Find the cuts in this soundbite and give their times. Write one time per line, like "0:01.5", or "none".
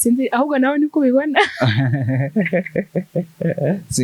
none